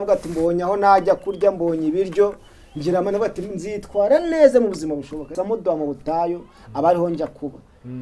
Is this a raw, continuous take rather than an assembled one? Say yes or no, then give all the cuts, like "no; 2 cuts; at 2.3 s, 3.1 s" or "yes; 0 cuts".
no; 1 cut; at 5.2 s